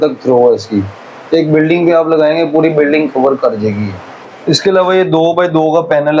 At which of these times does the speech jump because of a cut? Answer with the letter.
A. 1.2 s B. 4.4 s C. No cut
B